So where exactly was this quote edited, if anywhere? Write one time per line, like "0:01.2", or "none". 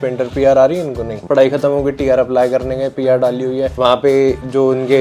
0:01.2

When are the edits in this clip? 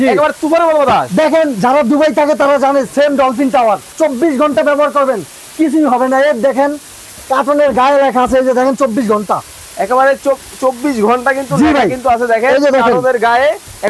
0:03.9

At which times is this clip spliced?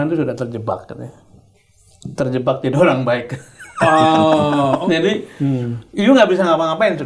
0:04.8

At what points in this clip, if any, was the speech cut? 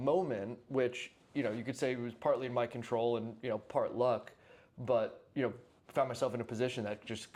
none

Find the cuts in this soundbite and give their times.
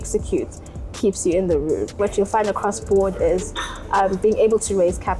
0:02.0

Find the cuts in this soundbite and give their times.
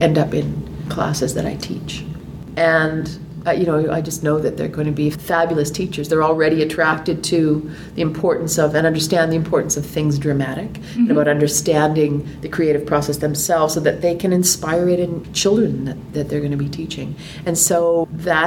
0:02.3
0:05.2

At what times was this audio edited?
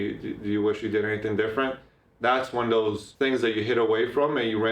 0:03.1

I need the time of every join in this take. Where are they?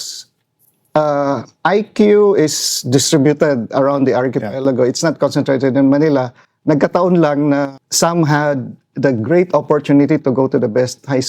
0:07.8

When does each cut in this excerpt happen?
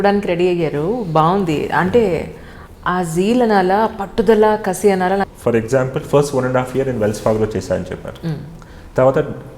0:05.3

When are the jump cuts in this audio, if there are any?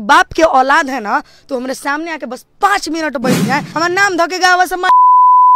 0:03.7

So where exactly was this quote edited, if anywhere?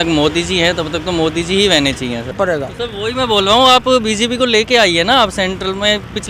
0:02.4

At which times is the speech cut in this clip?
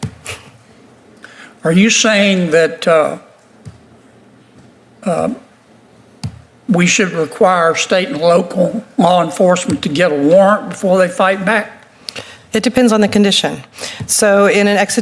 none

